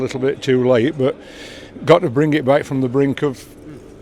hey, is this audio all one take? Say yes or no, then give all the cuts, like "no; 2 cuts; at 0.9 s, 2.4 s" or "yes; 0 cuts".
yes; 0 cuts